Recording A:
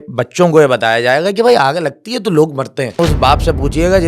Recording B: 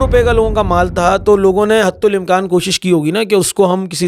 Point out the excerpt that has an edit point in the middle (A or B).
A